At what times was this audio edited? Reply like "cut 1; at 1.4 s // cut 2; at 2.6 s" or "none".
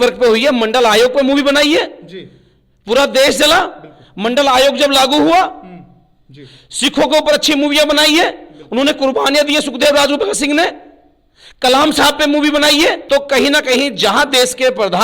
cut 1; at 13.0 s

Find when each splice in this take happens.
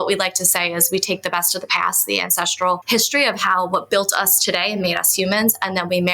cut 1; at 2.8 s

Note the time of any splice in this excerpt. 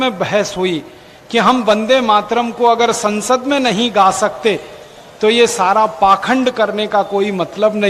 none

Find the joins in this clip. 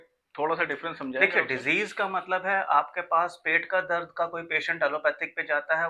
none

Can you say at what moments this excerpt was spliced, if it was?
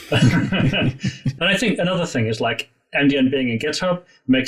cut 1; at 1.2 s

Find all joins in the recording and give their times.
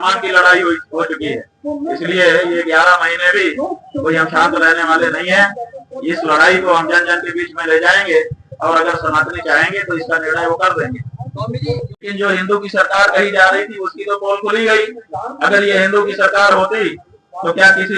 cut 1; at 12.1 s

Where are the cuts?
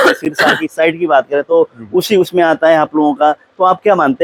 none

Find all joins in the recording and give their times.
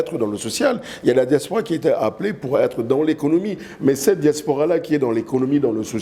none

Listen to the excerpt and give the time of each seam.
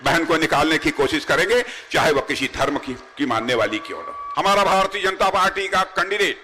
cut 1; at 4.2 s

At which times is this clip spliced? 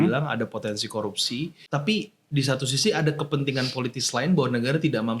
cut 1; at 1.6 s

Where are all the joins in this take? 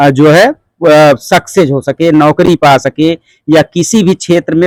none

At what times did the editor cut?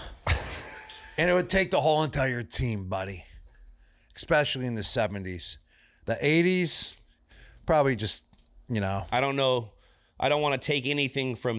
cut 1; at 9.0 s

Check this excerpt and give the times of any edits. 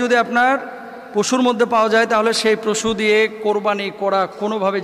none

